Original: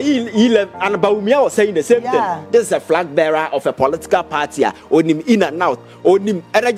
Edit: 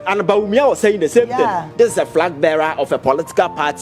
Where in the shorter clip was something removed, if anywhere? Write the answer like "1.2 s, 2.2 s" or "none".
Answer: none